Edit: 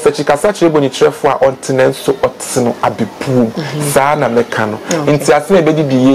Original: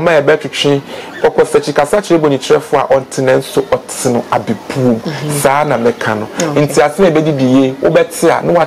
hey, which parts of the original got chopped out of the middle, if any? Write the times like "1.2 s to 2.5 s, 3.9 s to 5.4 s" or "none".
none